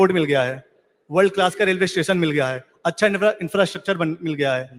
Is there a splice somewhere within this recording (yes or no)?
no